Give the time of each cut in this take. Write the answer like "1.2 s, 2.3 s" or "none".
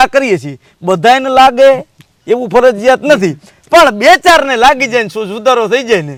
none